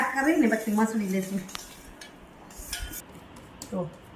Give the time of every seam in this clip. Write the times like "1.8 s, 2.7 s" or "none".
3.1 s

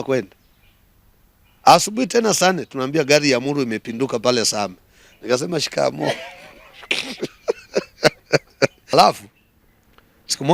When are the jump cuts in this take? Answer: 8.9 s

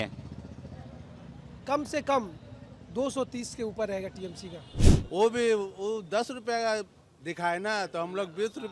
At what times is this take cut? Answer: 4.7 s

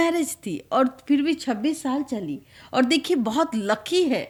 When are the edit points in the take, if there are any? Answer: none

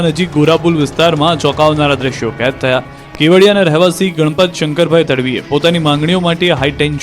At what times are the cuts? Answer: 5.3 s

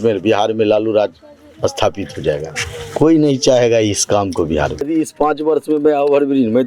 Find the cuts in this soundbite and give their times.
4.9 s

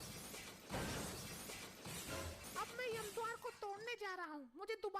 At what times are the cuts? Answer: 2.4 s

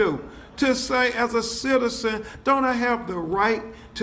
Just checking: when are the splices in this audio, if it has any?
2.0 s

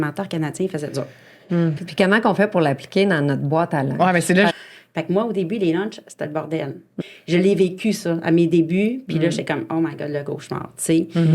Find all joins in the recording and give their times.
1.8 s, 4.5 s, 6.9 s

